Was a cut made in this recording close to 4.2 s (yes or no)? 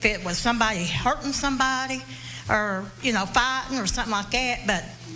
no